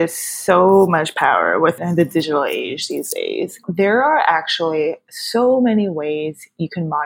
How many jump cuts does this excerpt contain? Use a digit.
2